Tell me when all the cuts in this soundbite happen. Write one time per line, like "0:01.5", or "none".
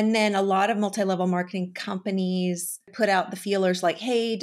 0:02.9